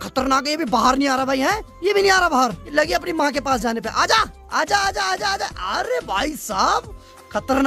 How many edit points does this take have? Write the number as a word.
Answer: zero